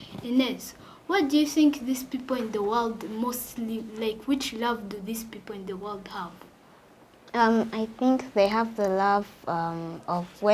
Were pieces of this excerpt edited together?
no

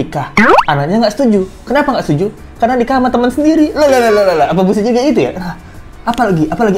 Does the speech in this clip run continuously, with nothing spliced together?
yes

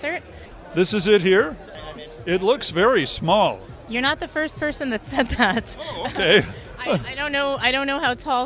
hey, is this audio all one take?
no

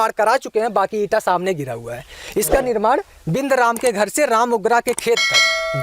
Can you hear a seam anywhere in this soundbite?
no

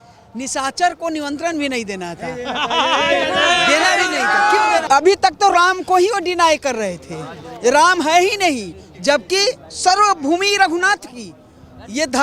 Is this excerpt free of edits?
no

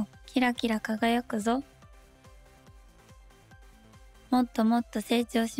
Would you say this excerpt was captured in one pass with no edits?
no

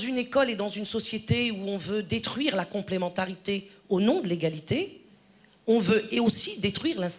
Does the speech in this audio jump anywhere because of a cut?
no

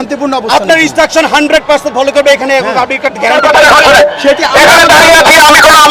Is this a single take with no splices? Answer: no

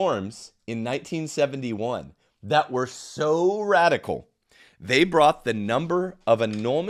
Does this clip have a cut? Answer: no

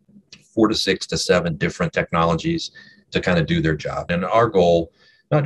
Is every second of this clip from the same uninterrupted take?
no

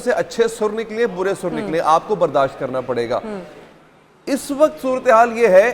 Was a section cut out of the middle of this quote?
no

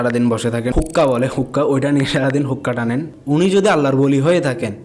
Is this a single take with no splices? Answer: no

